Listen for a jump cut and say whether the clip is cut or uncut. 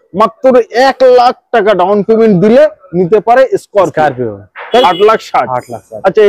cut